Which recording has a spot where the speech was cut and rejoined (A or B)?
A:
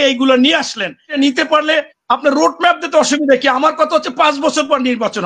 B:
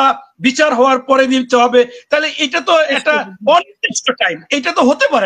A